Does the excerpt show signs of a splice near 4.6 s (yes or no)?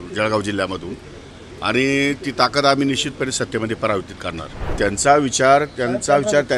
yes